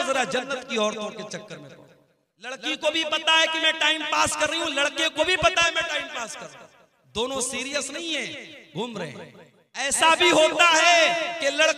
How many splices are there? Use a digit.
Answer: 2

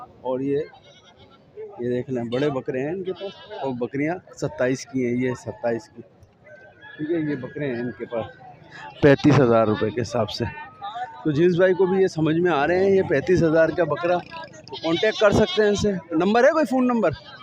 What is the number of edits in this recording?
0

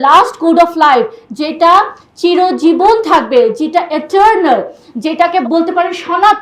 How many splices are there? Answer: 1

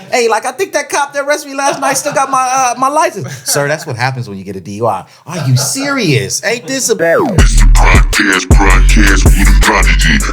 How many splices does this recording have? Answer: 1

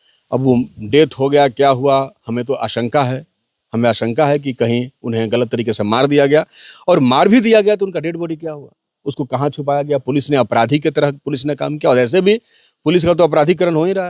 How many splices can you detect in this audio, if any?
0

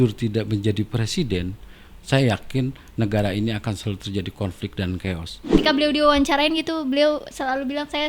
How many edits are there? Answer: 1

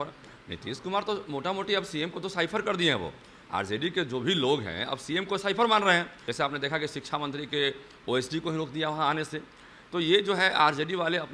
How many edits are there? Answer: 1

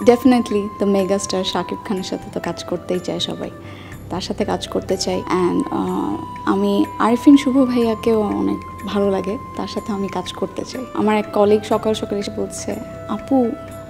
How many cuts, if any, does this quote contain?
3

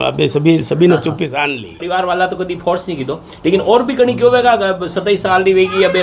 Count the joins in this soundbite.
1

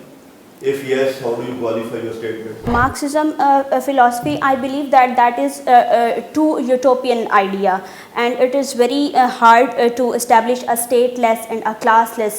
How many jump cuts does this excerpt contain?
1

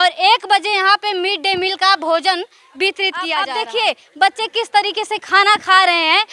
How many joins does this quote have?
1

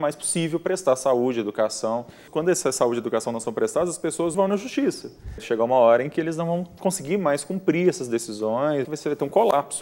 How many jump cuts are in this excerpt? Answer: 4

